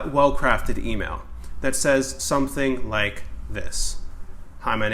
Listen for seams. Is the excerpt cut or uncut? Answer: uncut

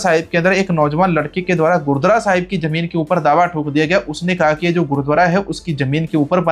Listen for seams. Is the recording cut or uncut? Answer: uncut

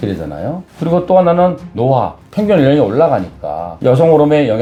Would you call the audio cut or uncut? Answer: uncut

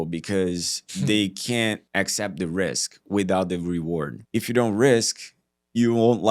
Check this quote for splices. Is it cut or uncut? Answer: cut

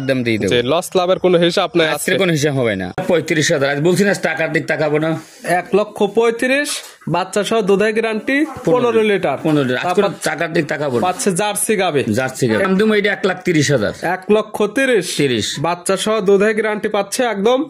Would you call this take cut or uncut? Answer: cut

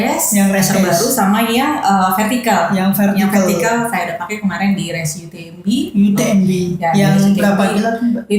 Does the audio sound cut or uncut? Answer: uncut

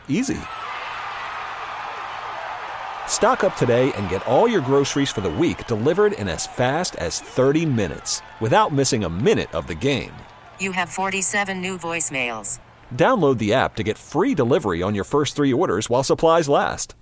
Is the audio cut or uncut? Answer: uncut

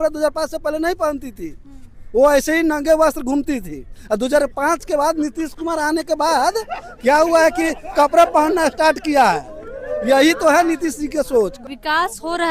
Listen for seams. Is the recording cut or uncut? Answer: cut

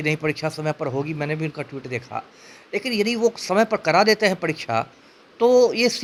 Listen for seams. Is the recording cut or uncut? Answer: uncut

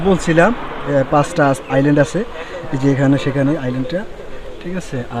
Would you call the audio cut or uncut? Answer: cut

